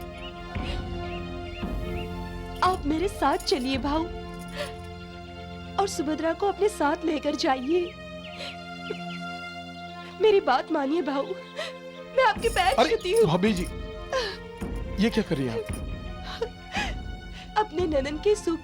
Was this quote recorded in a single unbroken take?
yes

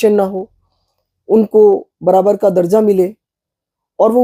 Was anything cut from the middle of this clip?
no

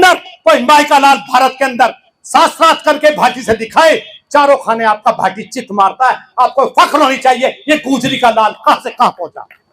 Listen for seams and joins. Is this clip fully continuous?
yes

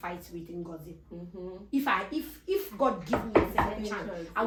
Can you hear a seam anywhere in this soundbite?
no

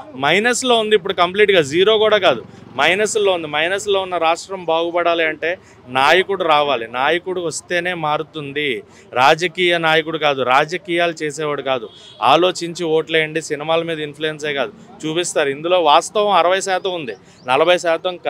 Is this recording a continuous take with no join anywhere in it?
yes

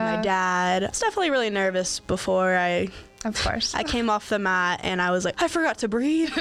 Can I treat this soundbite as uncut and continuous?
no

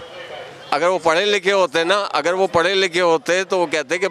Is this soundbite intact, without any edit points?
yes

